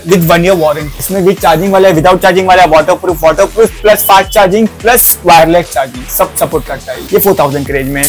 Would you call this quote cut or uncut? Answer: uncut